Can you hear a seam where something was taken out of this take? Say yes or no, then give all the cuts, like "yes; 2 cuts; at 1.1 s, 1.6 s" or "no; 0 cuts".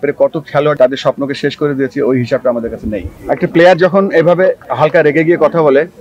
yes; 3 cuts; at 0.8 s, 3.1 s, 4.7 s